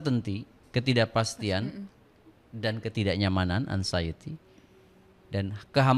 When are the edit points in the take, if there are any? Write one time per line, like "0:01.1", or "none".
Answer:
none